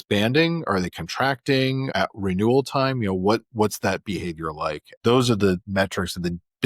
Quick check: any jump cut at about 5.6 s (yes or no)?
yes